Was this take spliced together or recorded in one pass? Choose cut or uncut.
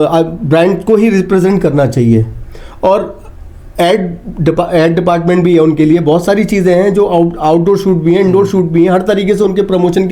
uncut